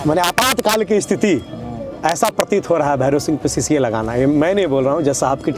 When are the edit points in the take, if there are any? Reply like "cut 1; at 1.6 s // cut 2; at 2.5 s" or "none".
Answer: none